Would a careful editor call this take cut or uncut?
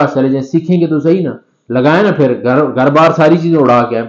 uncut